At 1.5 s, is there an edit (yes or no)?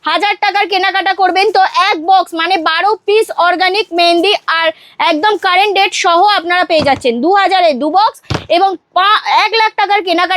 no